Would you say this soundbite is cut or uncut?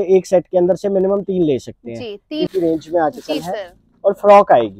cut